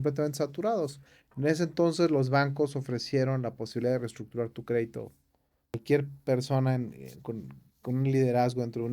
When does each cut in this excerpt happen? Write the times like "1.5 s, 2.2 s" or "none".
5.8 s